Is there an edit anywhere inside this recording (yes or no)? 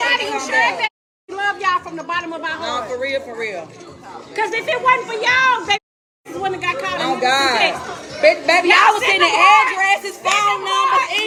no